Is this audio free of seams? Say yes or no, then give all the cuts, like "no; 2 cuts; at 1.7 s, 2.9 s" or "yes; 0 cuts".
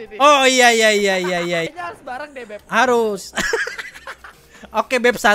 no; 1 cut; at 1.7 s